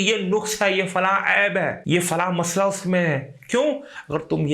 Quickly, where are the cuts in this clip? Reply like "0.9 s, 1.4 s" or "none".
1.8 s